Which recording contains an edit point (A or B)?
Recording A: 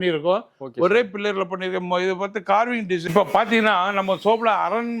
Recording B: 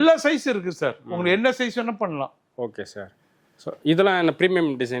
A